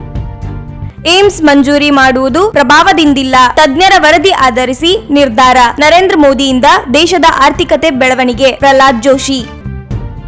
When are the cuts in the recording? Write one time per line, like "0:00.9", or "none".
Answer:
0:00.9